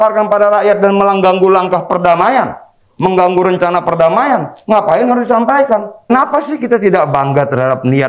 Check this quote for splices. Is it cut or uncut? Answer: cut